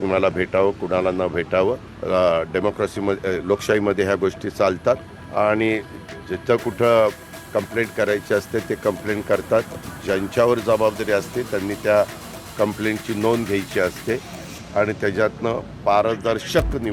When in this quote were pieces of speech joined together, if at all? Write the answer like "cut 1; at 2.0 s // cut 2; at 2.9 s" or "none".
cut 1; at 1.9 s // cut 2; at 5.2 s

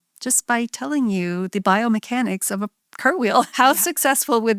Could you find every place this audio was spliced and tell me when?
cut 1; at 3.5 s

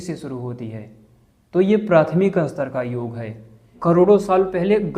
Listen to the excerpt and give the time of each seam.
cut 1; at 3.7 s

